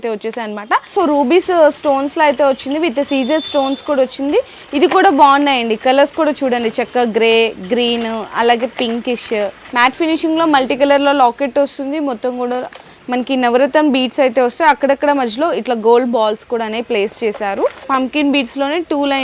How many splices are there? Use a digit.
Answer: 3